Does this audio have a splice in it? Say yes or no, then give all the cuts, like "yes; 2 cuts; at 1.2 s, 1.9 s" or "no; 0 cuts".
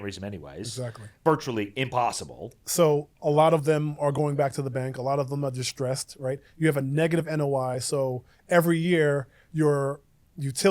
yes; 1 cut; at 1.1 s